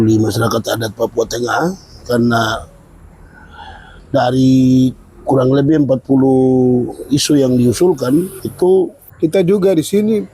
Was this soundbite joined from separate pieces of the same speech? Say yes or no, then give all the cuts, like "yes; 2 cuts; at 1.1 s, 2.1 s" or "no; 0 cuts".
yes; 2 cuts; at 8.4 s, 9.0 s